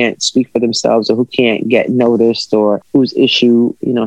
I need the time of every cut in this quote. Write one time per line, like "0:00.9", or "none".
0:02.8